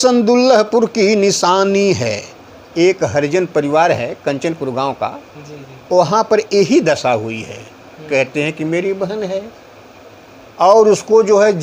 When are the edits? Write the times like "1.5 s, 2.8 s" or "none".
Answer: none